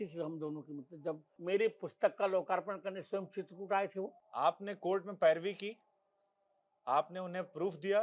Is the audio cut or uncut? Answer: cut